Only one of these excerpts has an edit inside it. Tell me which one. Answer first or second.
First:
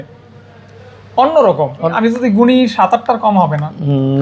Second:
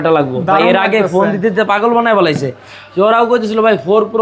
first